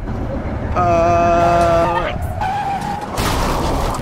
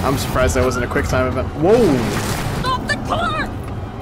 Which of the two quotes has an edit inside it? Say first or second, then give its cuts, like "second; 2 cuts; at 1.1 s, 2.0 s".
first; 1 cut; at 1.8 s